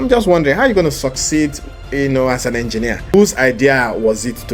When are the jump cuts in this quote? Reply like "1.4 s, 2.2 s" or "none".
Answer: 3.1 s